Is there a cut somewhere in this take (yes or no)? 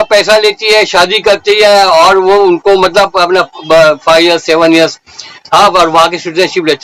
no